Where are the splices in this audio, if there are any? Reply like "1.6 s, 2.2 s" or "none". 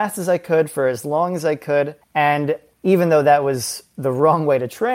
2.0 s, 2.7 s

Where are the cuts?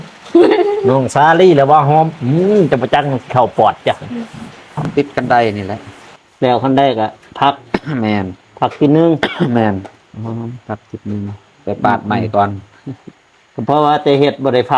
4.9 s

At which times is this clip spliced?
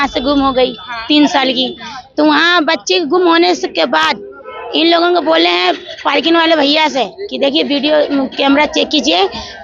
none

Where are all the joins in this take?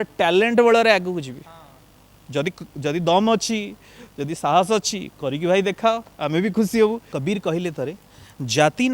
7.1 s

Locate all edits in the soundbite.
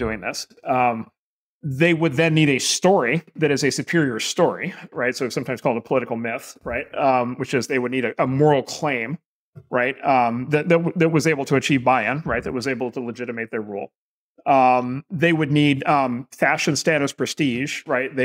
none

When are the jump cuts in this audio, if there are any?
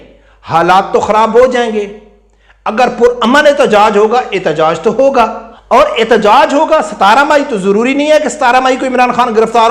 5.5 s

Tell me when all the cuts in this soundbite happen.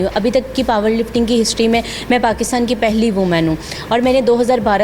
none

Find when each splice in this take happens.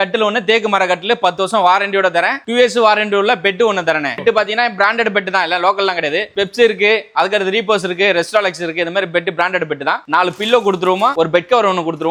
none

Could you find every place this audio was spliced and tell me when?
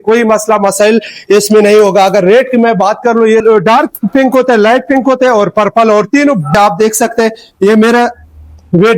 3.4 s, 6.5 s

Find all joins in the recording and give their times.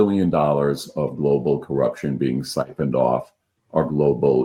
none

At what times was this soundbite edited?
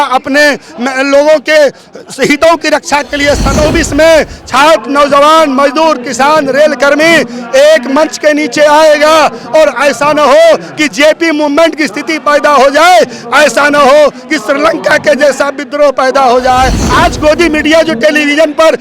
3.5 s, 16.8 s

